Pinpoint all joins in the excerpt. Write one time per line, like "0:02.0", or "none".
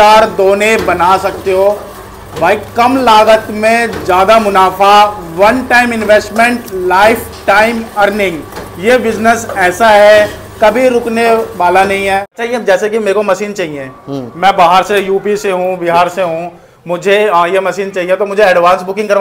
0:12.3